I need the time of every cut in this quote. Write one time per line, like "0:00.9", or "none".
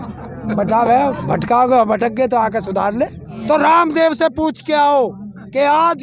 0:03.3